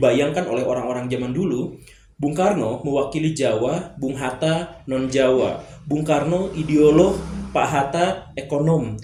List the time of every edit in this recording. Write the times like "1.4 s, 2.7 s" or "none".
none